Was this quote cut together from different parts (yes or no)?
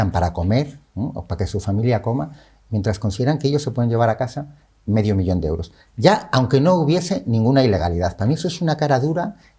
no